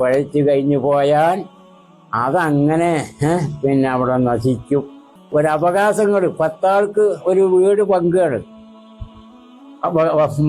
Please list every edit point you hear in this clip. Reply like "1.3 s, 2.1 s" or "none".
5.3 s